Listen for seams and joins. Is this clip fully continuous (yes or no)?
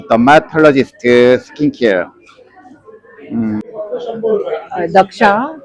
no